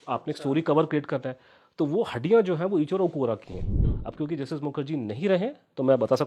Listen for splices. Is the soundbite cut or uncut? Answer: cut